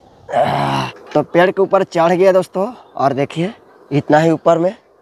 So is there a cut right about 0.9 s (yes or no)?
yes